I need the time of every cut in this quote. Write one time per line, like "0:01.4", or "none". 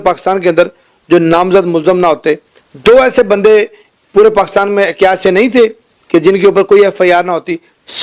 none